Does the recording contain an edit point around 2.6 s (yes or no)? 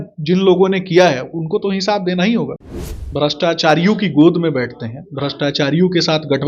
yes